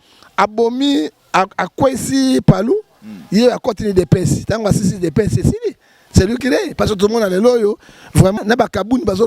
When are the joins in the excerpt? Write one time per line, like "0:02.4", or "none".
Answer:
0:08.4